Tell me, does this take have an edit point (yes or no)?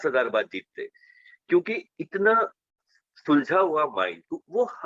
no